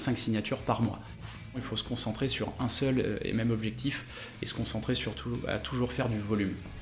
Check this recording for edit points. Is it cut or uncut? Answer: cut